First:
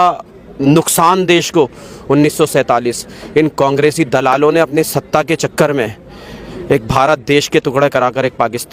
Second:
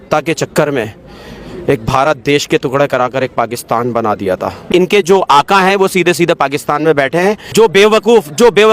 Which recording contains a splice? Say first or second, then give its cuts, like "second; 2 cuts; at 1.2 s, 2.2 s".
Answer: second; 2 cuts; at 4.6 s, 7.5 s